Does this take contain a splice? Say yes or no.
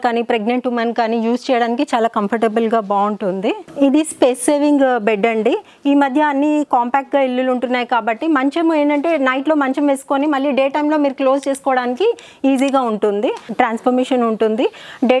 yes